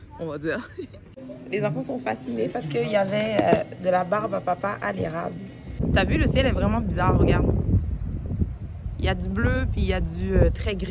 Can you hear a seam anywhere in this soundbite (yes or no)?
yes